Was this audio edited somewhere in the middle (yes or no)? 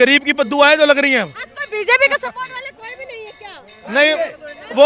no